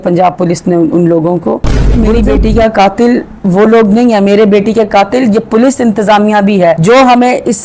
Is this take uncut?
no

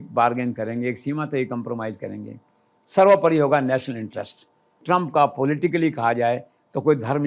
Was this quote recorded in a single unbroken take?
no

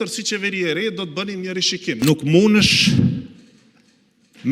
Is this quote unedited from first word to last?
no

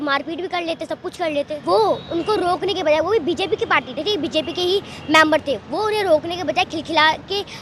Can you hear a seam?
yes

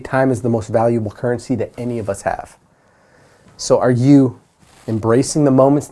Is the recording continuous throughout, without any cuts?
yes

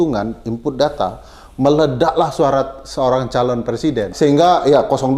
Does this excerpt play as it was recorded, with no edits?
yes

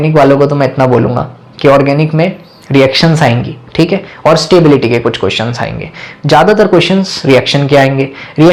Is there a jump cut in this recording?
no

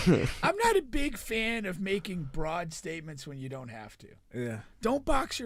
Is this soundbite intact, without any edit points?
yes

